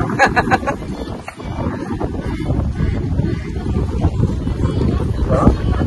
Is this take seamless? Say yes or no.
yes